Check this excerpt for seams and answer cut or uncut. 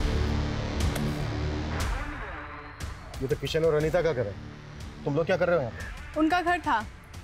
uncut